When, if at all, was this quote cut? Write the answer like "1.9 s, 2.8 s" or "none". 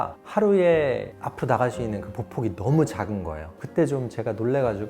3.5 s

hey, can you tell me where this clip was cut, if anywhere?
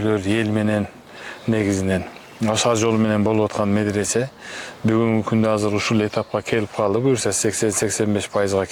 none

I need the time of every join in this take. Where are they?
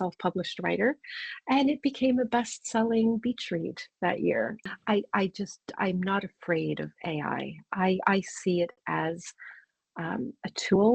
4.6 s

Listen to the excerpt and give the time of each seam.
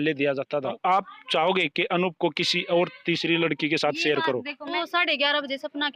0.8 s, 4.6 s

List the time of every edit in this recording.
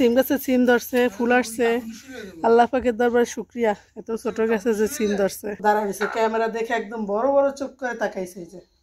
5.5 s

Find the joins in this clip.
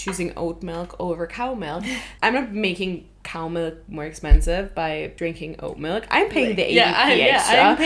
2.1 s, 5.1 s

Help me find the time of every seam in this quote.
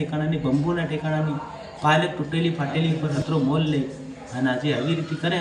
3.1 s

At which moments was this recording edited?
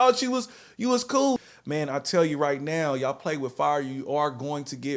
1.4 s

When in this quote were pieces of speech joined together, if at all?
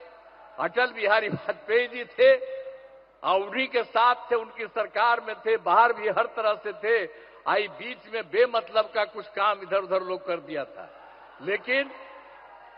none

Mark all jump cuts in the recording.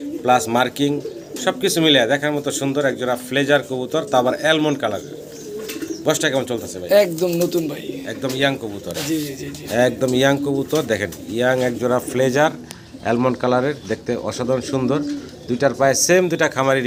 none

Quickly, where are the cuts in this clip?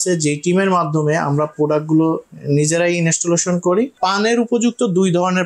3.9 s

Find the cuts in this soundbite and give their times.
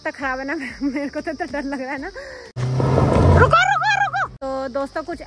2.5 s, 4.3 s

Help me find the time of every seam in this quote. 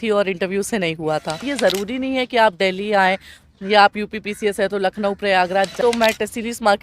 1.5 s, 5.7 s

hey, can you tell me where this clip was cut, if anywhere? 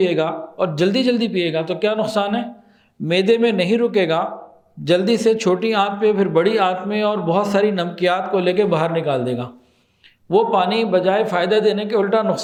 none

